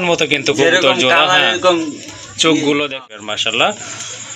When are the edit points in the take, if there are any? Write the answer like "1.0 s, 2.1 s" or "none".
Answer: 3.0 s